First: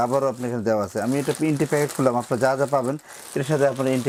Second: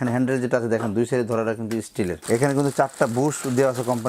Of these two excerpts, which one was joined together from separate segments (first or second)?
second